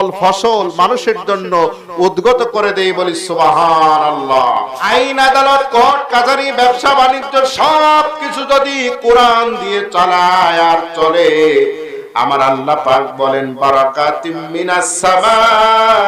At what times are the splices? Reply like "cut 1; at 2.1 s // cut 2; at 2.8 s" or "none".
cut 1; at 4.8 s